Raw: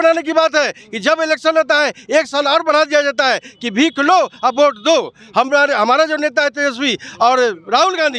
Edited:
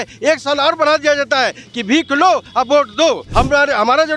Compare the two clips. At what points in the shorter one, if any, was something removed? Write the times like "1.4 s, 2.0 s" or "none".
3.2 s